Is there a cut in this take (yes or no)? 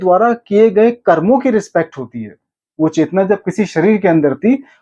no